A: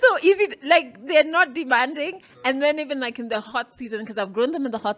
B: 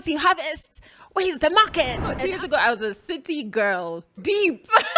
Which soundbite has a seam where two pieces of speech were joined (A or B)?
B